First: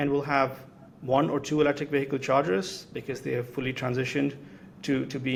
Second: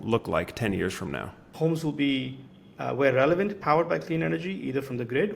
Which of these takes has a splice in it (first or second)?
second